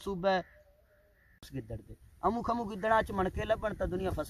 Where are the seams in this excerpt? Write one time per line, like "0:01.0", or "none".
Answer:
0:01.5